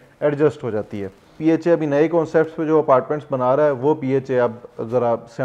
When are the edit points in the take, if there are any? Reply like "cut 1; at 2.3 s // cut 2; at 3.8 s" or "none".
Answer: cut 1; at 1.3 s